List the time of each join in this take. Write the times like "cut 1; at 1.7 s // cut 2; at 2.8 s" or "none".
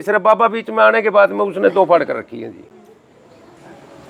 none